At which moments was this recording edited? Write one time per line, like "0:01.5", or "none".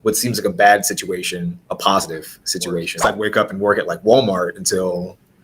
0:01.6
0:03.0